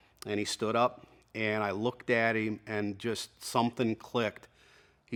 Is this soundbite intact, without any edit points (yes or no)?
yes